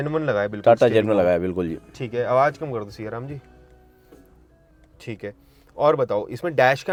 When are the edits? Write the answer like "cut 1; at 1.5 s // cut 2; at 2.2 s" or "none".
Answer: none